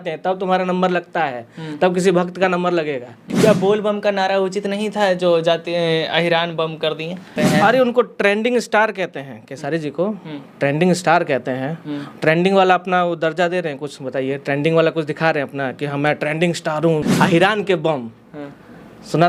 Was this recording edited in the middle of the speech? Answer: yes; 3 cuts; at 3.2 s, 7.3 s, 17.1 s

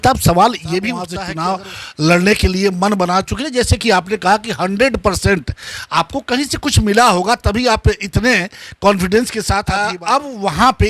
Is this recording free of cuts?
no; 2 cuts; at 1.2 s, 9.7 s

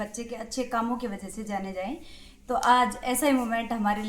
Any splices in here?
no; 0 cuts

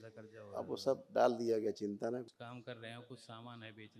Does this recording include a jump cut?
yes; 1 cut; at 2.2 s

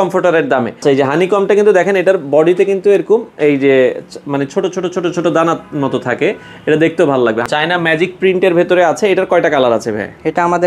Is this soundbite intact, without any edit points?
no; 2 cuts; at 0.8 s, 7.5 s

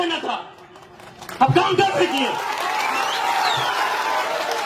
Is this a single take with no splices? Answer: yes; 0 cuts

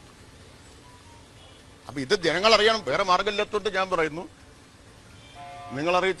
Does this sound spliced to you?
no; 0 cuts

